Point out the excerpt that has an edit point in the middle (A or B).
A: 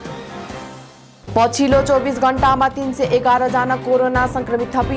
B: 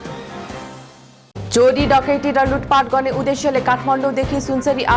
A